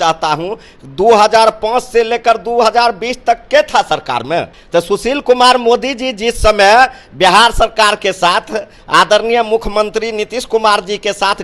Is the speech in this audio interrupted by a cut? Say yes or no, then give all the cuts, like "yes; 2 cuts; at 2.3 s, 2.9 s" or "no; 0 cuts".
yes; 1 cut; at 4.6 s